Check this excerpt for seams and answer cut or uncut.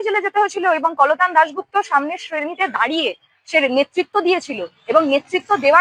uncut